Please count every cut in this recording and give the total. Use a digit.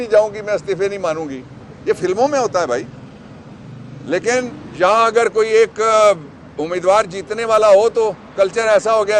1